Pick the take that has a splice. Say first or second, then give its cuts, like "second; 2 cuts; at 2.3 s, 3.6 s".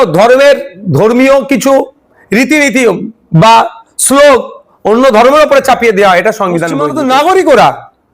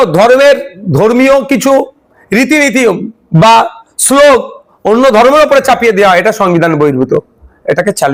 first; 1 cut; at 6.8 s